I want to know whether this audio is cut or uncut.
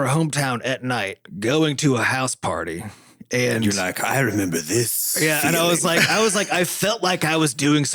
uncut